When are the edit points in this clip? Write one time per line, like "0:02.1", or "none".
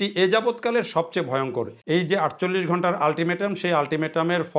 0:01.8